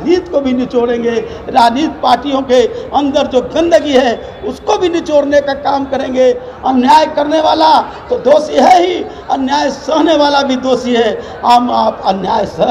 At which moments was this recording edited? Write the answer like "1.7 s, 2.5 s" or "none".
6.5 s